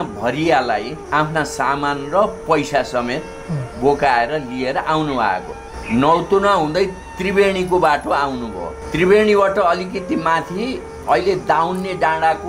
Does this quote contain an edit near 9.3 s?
no; 0 cuts

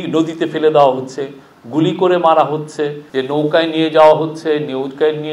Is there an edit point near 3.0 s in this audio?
yes; 1 cut; at 3.0 s

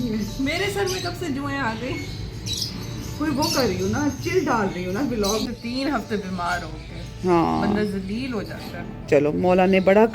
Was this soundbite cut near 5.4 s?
yes; 1 cut; at 5.4 s

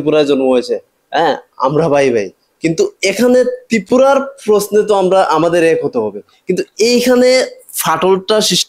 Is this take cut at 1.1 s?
no; 0 cuts

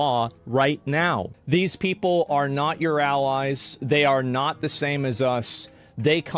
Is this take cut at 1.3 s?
yes; 1 cut; at 1.3 s

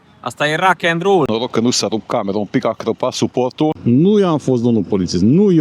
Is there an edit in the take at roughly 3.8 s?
yes; 2 cuts; at 1.3 s, 3.8 s

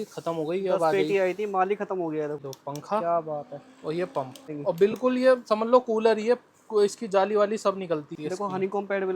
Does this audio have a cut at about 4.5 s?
yes; 3 cuts; at 2.4 s, 4.5 s, 8.1 s

